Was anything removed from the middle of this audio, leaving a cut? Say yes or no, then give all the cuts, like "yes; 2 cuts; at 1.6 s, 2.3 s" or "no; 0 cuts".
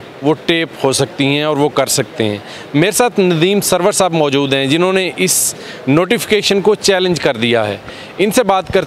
no; 0 cuts